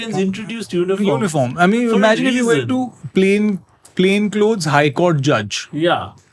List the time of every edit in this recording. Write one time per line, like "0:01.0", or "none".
none